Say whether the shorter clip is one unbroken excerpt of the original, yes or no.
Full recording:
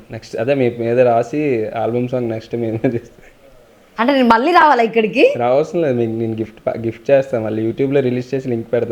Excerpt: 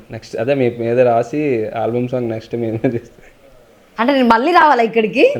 yes